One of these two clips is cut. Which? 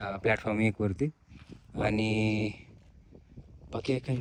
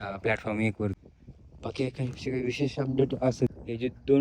second; 2 cuts; at 0.9 s, 3.5 s

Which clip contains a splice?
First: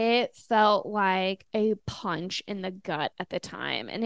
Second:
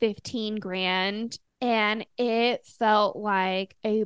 second; 1 cut; at 1.4 s

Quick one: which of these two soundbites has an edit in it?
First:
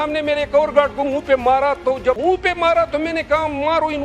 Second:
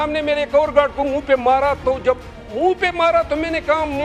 first; 1 cut; at 2.2 s

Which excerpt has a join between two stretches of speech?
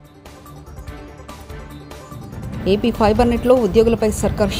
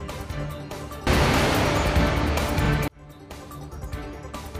second; 1 cut; at 1.0 s

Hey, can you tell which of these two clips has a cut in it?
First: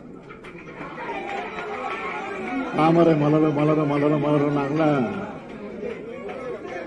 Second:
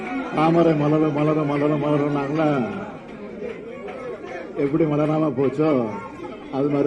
first; 1 cut; at 1.1 s

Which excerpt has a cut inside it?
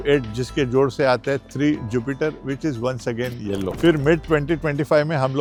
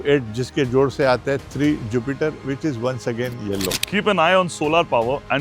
second; 1 cut; at 3.8 s

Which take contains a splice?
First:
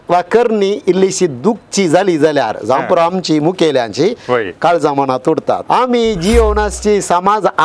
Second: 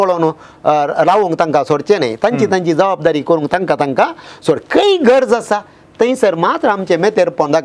first; 1 cut; at 5.6 s

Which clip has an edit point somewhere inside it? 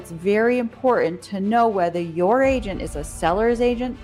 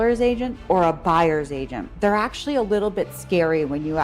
second; 1 cut; at 1.9 s

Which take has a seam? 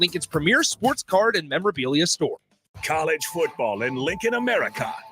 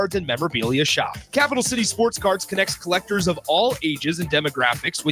first; 1 cut; at 2.6 s

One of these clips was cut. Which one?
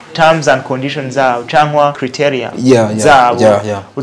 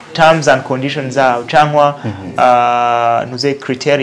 first; 1 cut; at 2.0 s

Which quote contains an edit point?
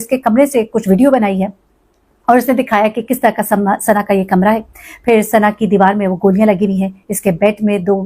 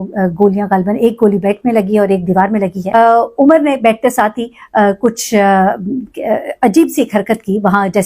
second; 1 cut; at 2.9 s

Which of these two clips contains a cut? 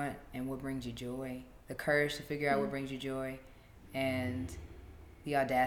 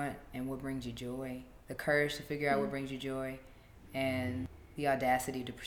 second; 1 cut; at 4.6 s

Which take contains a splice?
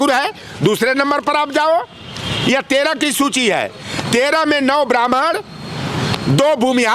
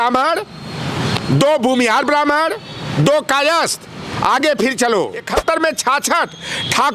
second; 1 cut; at 5.3 s

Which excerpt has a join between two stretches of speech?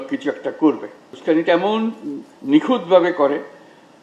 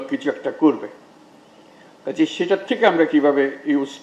first; 1 cut; at 1.1 s

